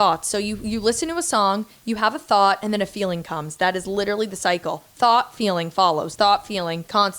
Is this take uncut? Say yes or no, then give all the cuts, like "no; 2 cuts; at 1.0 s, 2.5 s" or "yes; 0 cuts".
yes; 0 cuts